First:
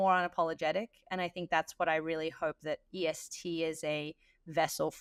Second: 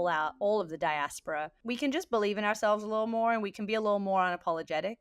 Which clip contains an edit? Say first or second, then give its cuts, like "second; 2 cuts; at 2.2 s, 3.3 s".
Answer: second; 1 cut; at 1.5 s